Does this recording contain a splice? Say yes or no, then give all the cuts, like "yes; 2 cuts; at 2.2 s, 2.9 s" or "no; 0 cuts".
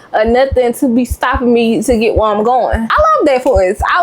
yes; 1 cut; at 2.9 s